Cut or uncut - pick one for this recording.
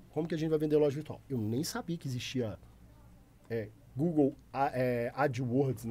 uncut